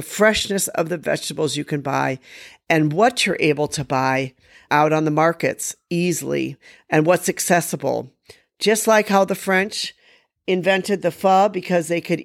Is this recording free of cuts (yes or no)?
yes